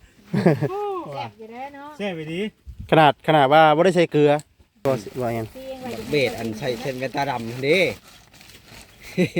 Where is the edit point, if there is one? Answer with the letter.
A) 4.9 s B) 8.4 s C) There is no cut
A